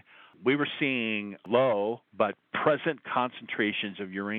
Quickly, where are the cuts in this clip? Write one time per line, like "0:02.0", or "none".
none